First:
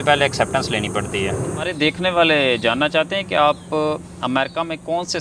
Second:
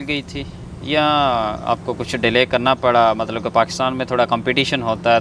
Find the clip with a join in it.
first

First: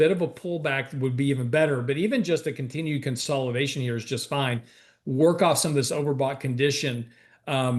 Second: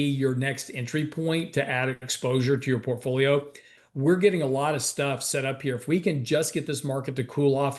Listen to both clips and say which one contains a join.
second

